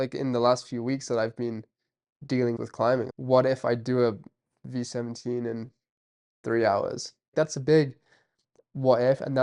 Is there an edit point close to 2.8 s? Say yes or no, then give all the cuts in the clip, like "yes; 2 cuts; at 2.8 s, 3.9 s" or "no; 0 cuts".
yes; 2 cuts; at 2.8 s, 7.1 s